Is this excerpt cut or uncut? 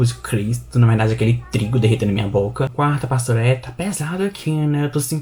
cut